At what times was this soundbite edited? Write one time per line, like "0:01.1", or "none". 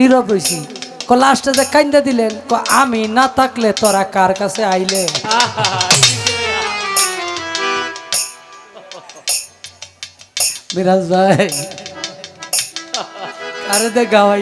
none